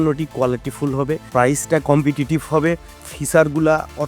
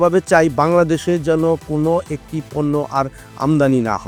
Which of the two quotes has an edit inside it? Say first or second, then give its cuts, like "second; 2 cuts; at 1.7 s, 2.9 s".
first; 2 cuts; at 1.3 s, 3.0 s